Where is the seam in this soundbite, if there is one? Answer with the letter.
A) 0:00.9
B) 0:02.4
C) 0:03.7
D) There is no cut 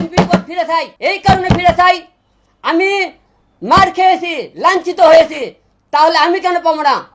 A